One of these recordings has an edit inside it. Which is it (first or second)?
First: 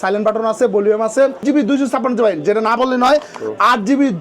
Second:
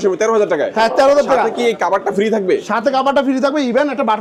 first